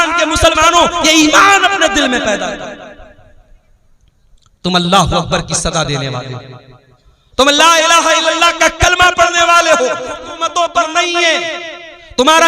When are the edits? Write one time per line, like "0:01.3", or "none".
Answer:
0:10.3